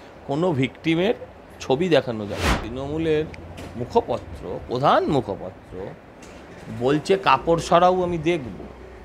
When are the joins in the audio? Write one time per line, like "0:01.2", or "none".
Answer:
0:02.7